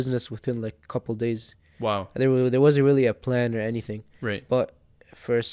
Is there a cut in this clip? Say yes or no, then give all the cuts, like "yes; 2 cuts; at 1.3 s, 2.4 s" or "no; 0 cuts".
no; 0 cuts